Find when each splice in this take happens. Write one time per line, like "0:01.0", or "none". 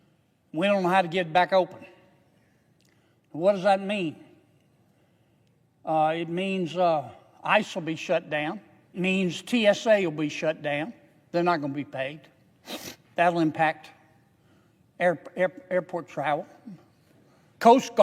0:08.9